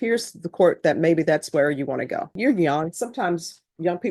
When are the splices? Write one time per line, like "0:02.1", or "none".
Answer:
0:02.4